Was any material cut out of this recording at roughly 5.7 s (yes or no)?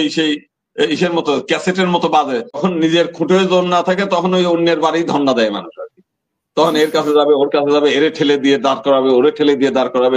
no